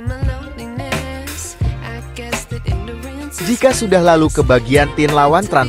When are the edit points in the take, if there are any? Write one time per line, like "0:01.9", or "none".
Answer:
0:03.5